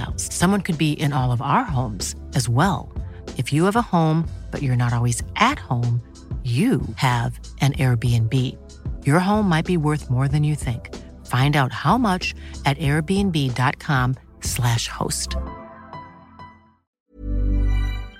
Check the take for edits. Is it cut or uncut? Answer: uncut